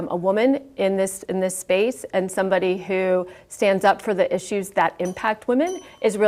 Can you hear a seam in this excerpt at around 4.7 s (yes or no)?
no